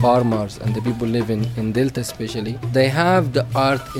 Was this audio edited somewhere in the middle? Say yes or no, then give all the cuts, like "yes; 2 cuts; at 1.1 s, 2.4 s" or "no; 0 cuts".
yes; 1 cut; at 2.6 s